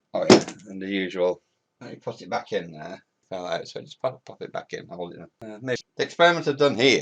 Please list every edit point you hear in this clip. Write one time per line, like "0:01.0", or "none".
0:05.8